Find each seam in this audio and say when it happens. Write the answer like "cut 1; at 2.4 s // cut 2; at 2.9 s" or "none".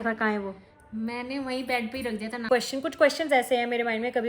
cut 1; at 2.5 s